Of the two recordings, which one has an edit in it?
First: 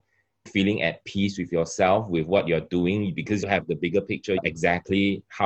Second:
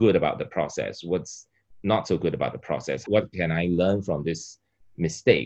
first; 2 cuts; at 3.4 s, 4.4 s

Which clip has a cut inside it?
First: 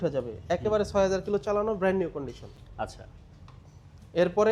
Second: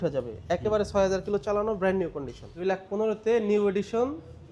second; 1 cut; at 2.6 s

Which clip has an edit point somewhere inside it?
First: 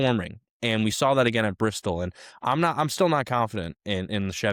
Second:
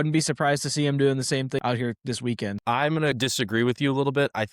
second; 2 cuts; at 1.6 s, 2.7 s

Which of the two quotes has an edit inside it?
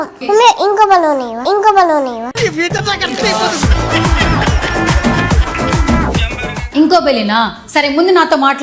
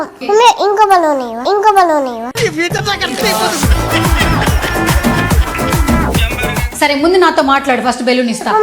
second; 1 cut; at 6.6 s

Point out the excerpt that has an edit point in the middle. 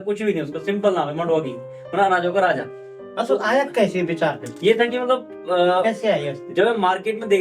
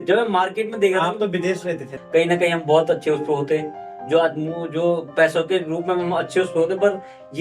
second; 1 cut; at 1.9 s

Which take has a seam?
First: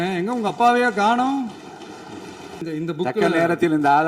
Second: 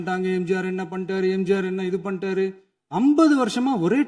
first; 1 cut; at 2.7 s

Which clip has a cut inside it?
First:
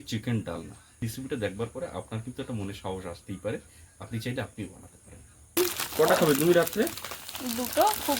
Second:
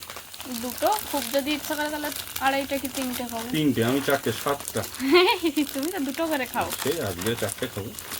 first; 2 cuts; at 1.0 s, 5.6 s

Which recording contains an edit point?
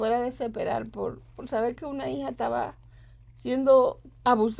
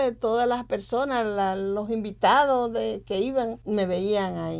second; 1 cut; at 3.6 s

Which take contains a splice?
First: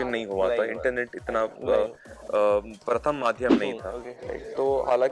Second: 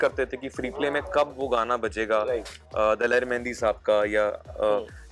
first; 1 cut; at 4.1 s

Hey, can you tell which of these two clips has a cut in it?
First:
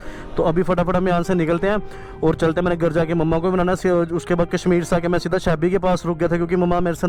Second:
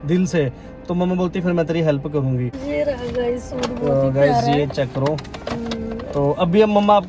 second; 1 cut; at 2.5 s

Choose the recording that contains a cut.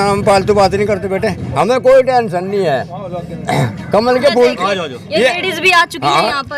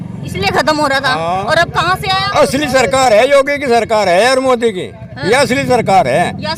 first; 1 cut; at 1.4 s

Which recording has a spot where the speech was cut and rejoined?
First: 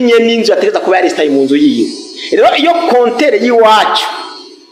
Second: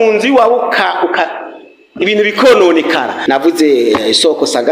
second; 1 cut; at 3.2 s

